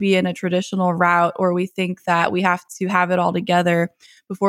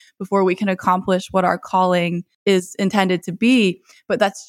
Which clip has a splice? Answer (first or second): second